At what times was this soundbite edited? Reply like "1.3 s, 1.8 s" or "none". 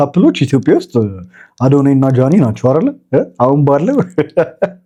none